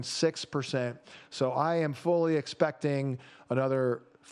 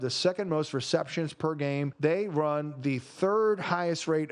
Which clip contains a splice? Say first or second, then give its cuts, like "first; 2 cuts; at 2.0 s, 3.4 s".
second; 1 cut; at 1.9 s